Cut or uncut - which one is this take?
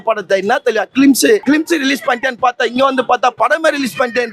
cut